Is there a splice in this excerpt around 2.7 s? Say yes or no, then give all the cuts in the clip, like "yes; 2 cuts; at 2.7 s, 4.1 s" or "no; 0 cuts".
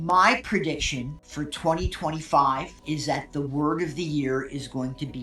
yes; 2 cuts; at 1.2 s, 2.7 s